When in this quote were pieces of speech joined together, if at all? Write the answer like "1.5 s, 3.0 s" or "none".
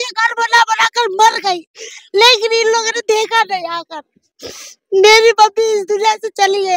none